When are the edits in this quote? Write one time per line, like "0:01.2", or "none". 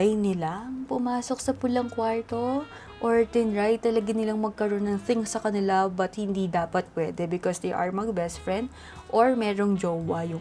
none

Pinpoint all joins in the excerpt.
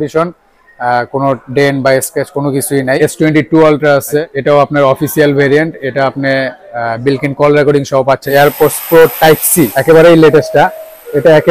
0:03.0
0:04.3
0:08.2
0:09.7

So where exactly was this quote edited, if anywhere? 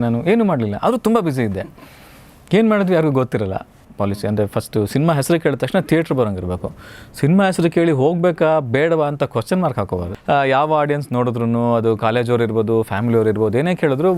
0:03.8
0:09.9

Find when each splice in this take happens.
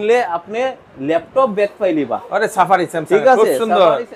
none

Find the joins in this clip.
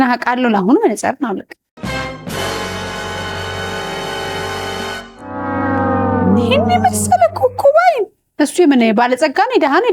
0:08.2

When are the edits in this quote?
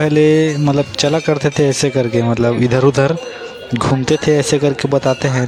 none

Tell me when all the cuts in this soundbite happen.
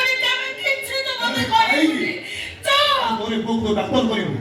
0:03.3

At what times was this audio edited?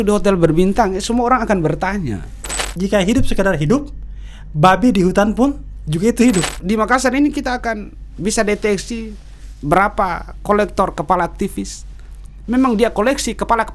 0:02.8
0:06.5

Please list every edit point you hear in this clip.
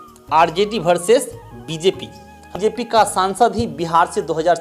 0:02.5

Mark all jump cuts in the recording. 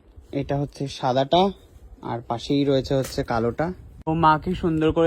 0:03.9

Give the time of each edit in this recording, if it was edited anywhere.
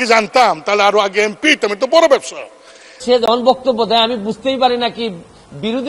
0:03.0

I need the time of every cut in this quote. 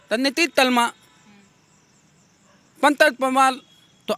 none

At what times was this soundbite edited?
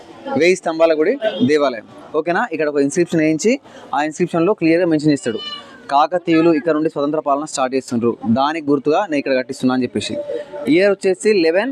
none

